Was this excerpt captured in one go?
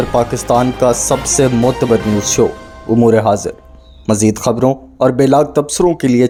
yes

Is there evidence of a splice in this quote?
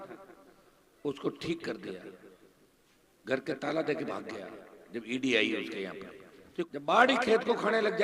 yes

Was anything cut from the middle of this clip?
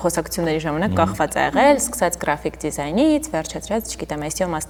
no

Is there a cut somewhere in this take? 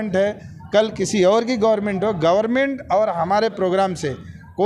no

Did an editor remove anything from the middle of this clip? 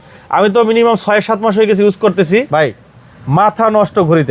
yes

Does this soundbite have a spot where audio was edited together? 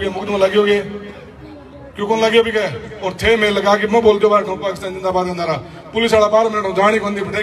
no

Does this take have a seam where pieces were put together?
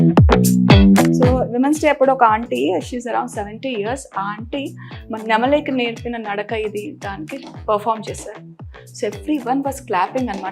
yes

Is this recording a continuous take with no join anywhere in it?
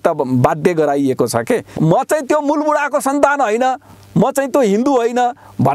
no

